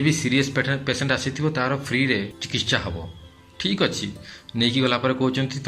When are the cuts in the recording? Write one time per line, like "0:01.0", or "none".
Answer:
0:02.4